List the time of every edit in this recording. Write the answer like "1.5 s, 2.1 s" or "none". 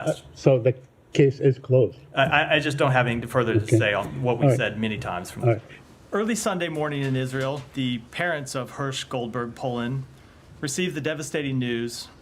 5.7 s